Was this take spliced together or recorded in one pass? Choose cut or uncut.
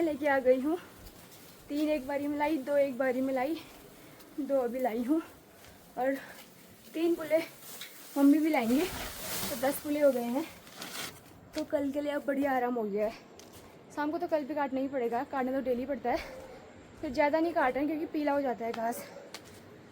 uncut